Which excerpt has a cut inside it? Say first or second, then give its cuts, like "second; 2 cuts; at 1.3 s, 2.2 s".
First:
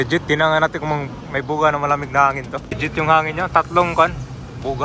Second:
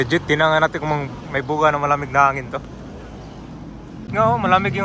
first; 1 cut; at 2.7 s